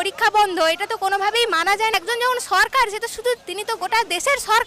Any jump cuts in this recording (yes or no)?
yes